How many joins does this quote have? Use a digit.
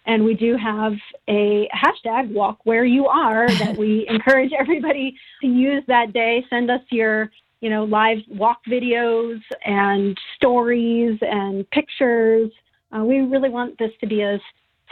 2